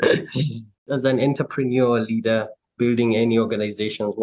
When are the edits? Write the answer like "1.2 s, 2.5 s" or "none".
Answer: 2.6 s

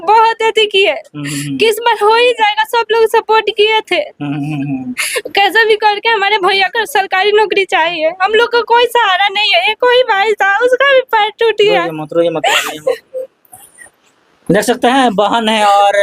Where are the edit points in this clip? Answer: none

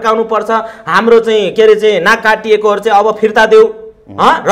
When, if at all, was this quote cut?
none

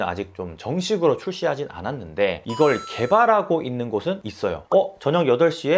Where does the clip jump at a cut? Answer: 4.6 s

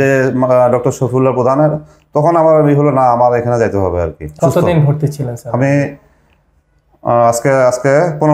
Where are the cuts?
4.3 s

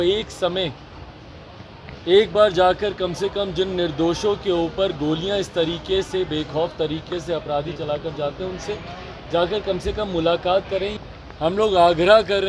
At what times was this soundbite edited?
10.9 s

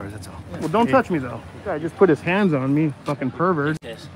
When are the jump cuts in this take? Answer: 1.9 s

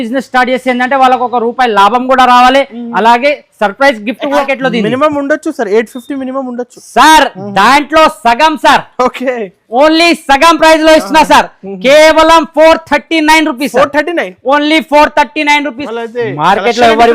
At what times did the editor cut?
4.4 s, 15.8 s

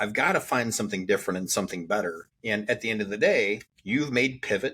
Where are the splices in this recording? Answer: 2.3 s, 3.7 s

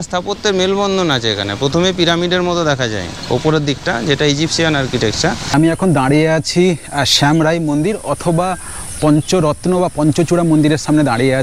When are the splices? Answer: 5.4 s

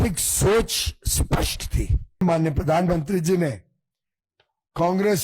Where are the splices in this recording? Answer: 2.2 s

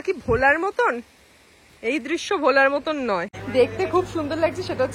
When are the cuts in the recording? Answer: 3.3 s

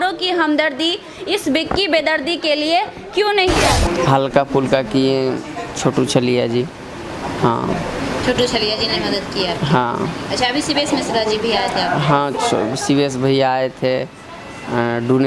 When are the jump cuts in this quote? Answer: 3.7 s

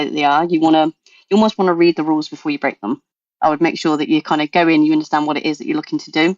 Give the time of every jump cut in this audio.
3.2 s

